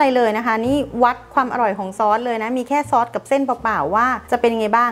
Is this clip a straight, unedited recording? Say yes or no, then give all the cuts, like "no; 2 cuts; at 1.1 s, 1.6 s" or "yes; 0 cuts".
yes; 0 cuts